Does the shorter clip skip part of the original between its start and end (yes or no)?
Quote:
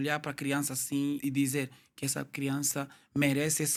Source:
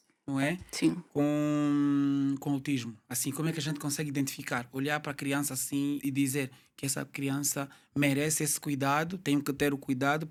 no